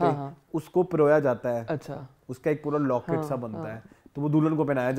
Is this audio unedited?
yes; 0 cuts

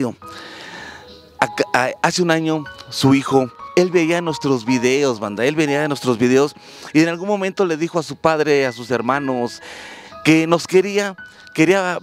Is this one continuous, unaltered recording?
no; 2 cuts; at 3.7 s, 9.7 s

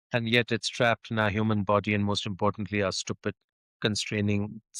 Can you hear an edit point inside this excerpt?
no; 0 cuts

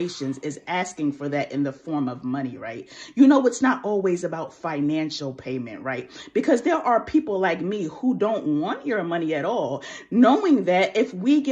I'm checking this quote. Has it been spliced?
yes; 1 cut; at 7.9 s

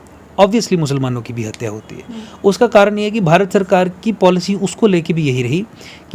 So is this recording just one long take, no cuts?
yes; 0 cuts

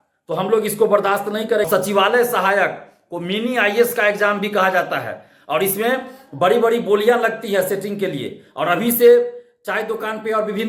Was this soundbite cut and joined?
yes; 1 cut; at 1.7 s

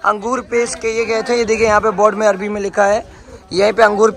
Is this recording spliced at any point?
no; 0 cuts

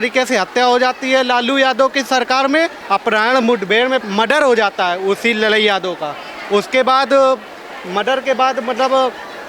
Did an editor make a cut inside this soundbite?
yes; 2 cuts; at 2.8 s, 4.0 s

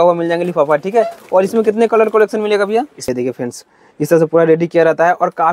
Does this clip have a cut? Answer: yes; 1 cut; at 3.1 s

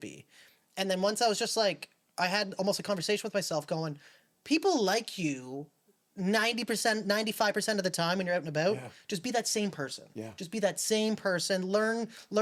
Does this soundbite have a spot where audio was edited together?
no; 0 cuts

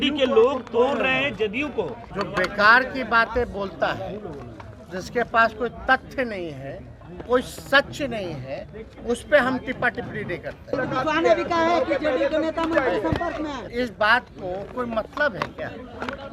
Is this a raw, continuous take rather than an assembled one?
no; 3 cuts; at 2.0 s, 10.7 s, 13.6 s

